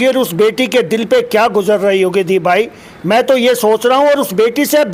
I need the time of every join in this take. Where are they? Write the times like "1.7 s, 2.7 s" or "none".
none